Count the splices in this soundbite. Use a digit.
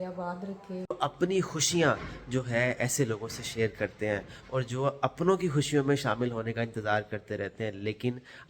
1